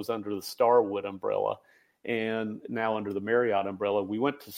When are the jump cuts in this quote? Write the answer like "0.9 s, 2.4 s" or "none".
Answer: none